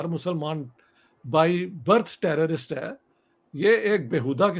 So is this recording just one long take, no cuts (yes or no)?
yes